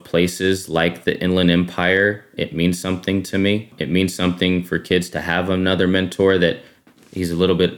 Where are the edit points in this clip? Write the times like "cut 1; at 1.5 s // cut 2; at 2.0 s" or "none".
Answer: cut 1; at 3.8 s